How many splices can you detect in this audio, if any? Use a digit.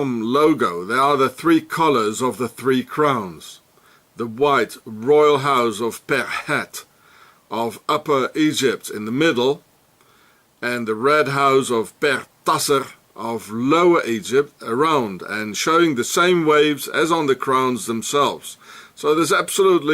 1